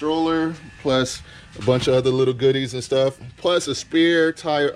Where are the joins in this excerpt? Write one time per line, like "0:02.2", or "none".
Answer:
none